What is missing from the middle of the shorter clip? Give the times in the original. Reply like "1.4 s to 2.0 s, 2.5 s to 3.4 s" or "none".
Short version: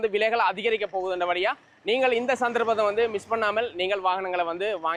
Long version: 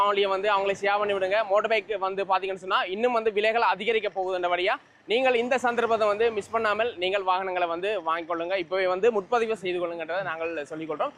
none